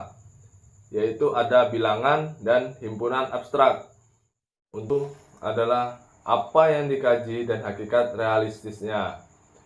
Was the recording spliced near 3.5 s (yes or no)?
no